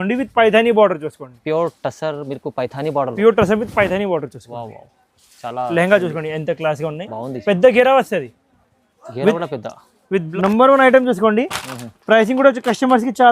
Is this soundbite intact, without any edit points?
no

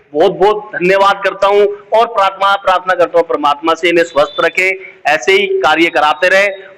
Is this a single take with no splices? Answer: yes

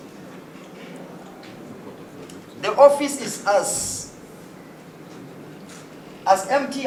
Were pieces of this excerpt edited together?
no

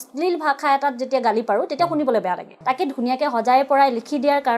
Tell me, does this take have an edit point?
yes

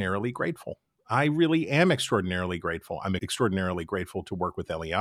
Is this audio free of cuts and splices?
no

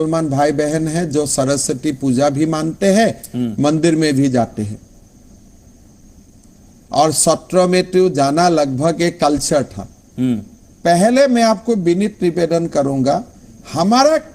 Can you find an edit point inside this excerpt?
yes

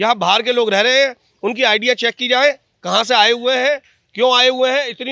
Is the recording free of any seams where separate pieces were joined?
yes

